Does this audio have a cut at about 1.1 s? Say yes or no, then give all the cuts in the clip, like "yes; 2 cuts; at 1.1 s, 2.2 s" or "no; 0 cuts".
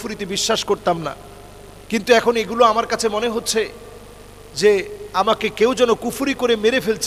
no; 0 cuts